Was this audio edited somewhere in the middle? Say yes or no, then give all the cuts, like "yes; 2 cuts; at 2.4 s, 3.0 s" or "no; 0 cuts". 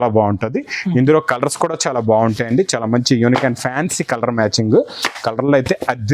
no; 0 cuts